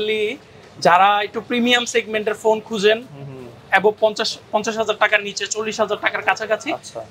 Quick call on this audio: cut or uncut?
uncut